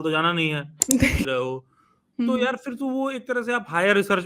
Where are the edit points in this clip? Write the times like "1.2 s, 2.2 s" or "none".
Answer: 1.3 s